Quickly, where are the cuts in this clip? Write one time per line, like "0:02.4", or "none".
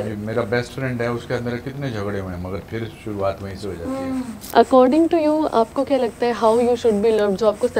0:04.4